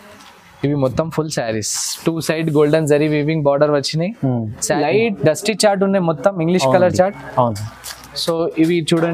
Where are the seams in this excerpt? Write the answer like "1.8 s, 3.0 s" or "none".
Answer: 4.7 s